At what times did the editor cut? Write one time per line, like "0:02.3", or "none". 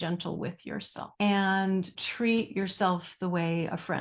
0:01.0
0:02.0